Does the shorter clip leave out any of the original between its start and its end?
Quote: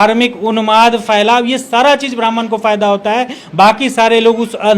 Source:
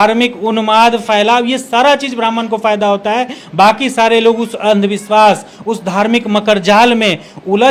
no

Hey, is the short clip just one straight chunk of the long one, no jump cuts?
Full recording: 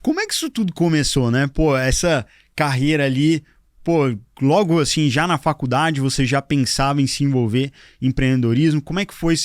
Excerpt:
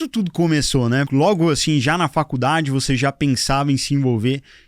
no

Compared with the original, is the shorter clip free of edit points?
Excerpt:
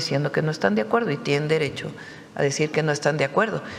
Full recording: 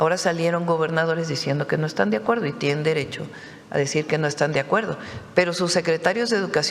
yes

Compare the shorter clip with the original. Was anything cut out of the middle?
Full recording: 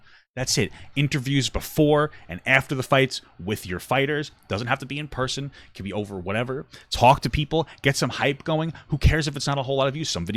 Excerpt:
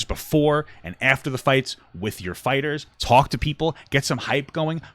yes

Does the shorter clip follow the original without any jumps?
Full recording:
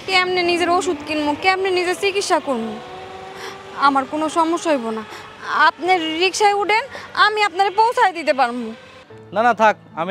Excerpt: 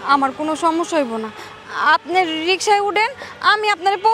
yes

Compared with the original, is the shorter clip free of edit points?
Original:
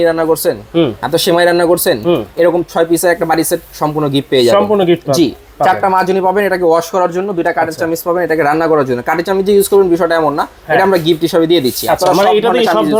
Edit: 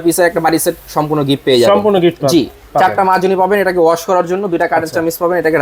yes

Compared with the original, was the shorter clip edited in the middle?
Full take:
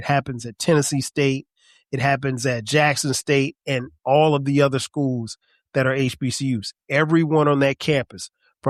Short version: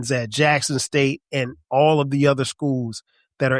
no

